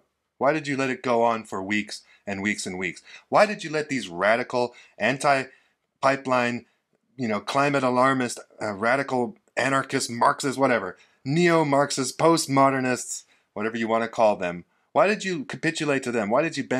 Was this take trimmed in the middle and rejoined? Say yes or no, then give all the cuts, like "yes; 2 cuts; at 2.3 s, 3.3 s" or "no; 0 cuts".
no; 0 cuts